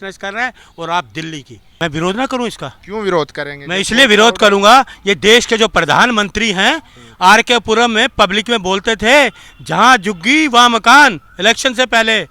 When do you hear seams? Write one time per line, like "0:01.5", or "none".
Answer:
0:01.8